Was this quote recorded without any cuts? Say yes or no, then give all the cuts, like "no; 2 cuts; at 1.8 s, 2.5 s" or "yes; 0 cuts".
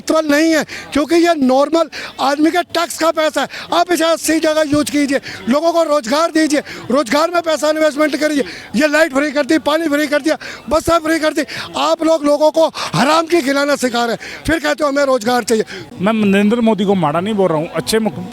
no; 1 cut; at 15.8 s